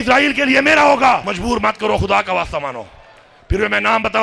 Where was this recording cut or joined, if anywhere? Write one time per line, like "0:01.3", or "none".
0:01.3